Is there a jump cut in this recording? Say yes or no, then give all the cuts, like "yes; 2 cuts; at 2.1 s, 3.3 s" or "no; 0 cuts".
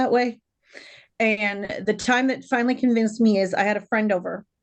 no; 0 cuts